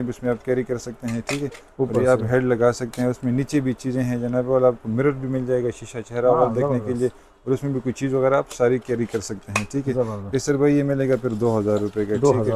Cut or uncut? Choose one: uncut